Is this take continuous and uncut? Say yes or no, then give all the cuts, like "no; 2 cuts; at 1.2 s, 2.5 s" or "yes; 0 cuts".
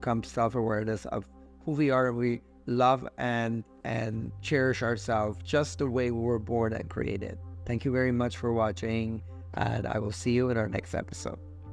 yes; 0 cuts